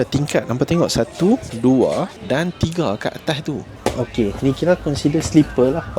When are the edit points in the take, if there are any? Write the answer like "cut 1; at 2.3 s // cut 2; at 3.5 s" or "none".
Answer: cut 1; at 1.5 s // cut 2; at 2.2 s // cut 3; at 3.7 s